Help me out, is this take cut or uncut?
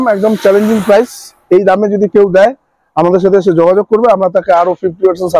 uncut